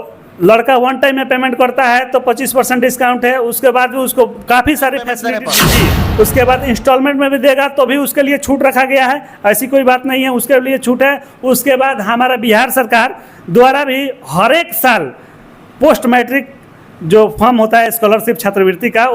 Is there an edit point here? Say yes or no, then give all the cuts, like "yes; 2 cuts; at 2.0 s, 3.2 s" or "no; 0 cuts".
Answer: yes; 1 cut; at 5.4 s